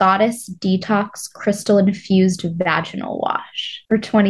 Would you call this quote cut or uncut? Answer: uncut